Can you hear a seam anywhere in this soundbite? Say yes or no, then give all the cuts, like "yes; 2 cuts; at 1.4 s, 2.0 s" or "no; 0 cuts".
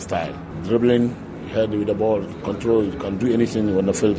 no; 0 cuts